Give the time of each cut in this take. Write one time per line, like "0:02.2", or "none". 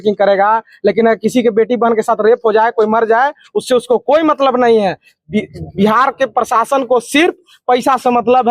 none